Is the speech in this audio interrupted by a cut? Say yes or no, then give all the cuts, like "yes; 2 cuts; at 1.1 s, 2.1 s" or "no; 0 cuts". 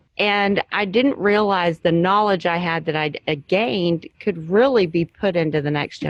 no; 0 cuts